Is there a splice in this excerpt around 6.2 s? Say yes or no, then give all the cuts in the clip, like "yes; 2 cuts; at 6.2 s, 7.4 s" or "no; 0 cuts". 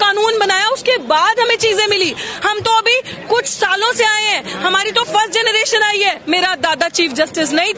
yes; 1 cut; at 6.2 s